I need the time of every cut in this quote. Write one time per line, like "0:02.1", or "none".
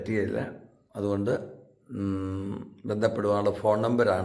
none